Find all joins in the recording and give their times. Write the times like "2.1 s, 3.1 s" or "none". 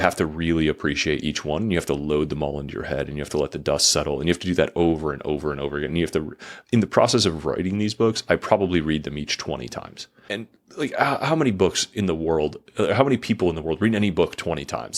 none